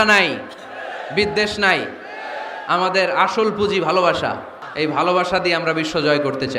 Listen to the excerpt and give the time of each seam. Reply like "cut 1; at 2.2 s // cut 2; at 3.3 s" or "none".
cut 1; at 4.6 s